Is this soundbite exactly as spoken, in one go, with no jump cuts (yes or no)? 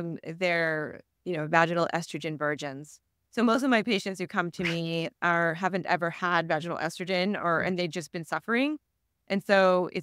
yes